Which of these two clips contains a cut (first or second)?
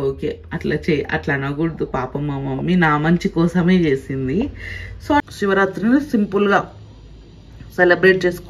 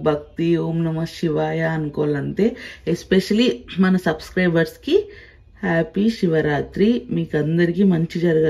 first